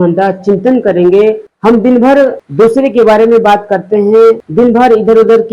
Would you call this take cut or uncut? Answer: cut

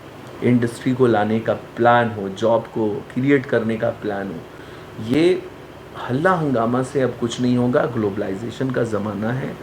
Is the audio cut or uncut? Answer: uncut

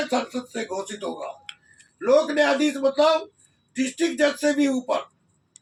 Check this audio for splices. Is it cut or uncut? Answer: uncut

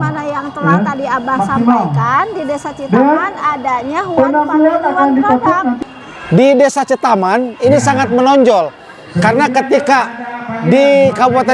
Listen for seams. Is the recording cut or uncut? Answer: cut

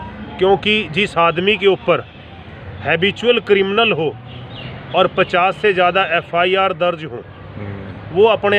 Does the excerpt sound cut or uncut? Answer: uncut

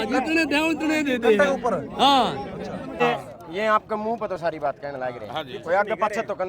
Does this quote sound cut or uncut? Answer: cut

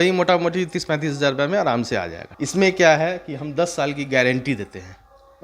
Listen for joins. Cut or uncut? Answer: cut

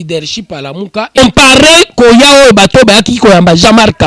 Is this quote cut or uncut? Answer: cut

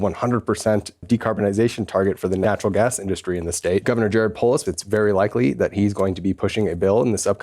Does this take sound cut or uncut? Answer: cut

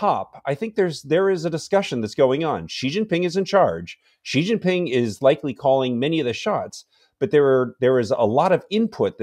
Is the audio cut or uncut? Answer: uncut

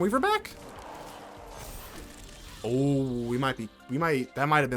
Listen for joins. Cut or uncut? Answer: uncut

